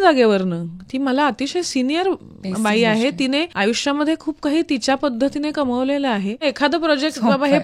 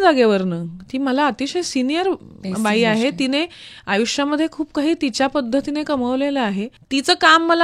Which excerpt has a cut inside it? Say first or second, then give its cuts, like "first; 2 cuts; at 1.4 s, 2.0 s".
first; 2 cuts; at 3.5 s, 6.4 s